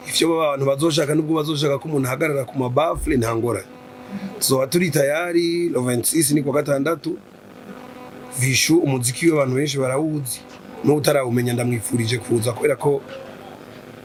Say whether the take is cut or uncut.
uncut